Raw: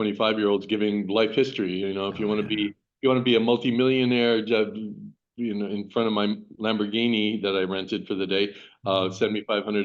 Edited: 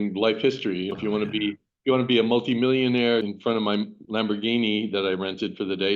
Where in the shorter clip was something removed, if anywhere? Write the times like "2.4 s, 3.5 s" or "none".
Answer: 0.9 s, 3.2 s